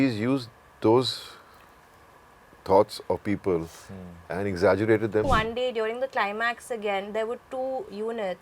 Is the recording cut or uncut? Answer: cut